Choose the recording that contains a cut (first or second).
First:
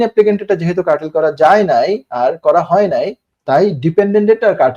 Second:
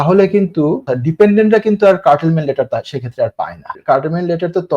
second